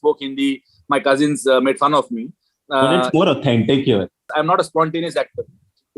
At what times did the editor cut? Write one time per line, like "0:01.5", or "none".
0:04.3